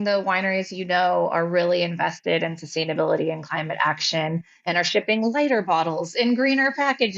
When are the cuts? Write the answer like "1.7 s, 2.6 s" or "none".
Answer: none